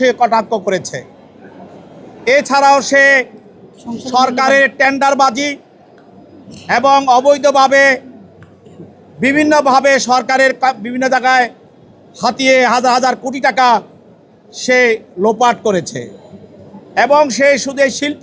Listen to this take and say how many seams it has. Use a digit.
0